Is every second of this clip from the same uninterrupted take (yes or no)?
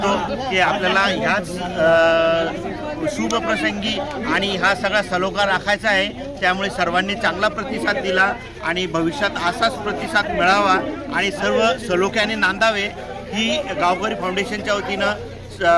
yes